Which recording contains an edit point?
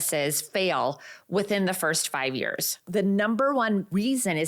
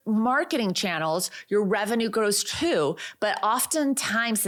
first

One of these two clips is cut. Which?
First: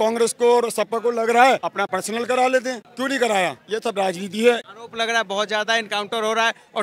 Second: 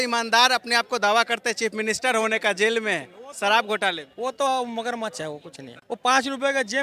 first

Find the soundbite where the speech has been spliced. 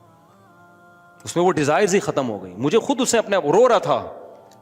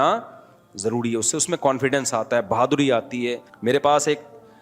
second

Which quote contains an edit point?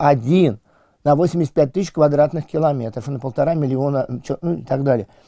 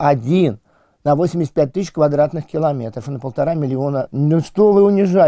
second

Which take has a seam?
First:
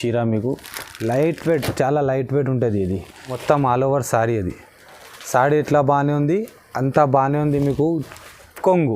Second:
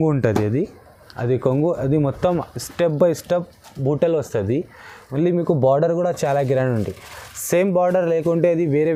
first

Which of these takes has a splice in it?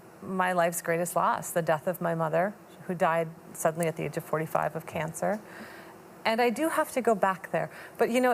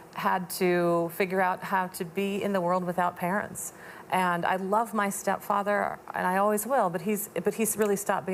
first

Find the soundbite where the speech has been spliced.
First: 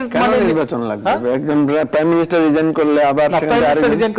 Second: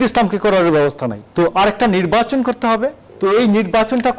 second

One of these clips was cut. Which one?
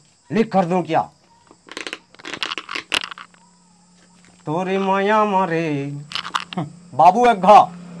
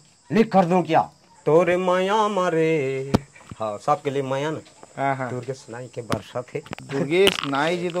second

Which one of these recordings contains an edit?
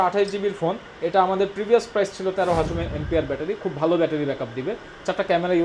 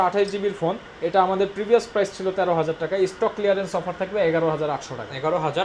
first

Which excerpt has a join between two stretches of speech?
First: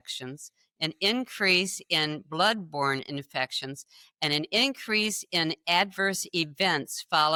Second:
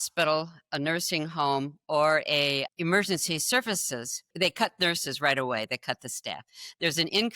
second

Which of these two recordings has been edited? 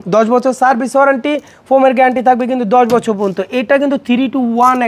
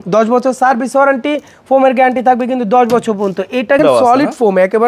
second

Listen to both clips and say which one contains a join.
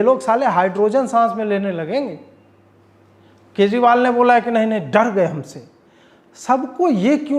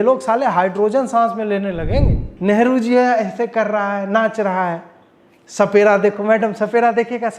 second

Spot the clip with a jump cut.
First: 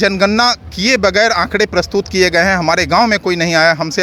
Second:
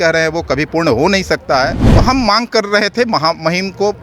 second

